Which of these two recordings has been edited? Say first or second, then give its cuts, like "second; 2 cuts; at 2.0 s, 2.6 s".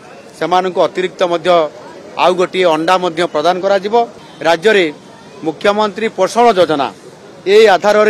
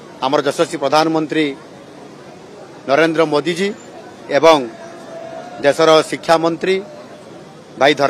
first; 1 cut; at 4.2 s